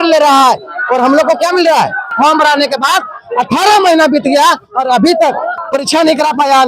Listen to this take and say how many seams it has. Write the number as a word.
two